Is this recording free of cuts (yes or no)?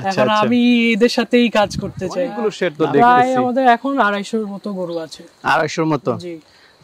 no